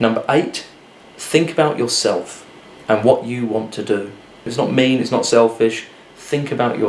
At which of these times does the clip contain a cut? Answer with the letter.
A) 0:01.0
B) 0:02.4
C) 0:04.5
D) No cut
C